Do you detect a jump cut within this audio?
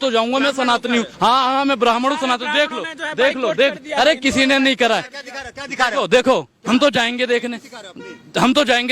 yes; 1 cut; at 1.1 s

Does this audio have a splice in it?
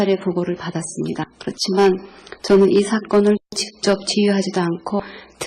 yes; 1 cut; at 3.7 s

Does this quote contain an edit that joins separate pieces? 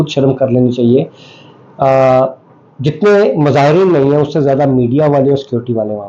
no; 0 cuts

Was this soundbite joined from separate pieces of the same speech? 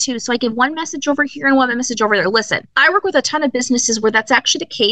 yes; 1 cut; at 2.6 s

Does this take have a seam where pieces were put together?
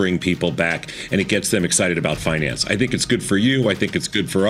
no; 0 cuts

